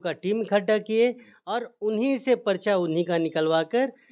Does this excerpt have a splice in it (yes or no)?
no